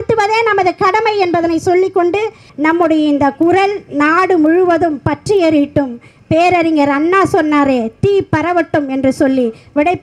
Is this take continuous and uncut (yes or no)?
yes